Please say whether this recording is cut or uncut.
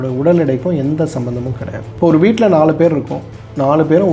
uncut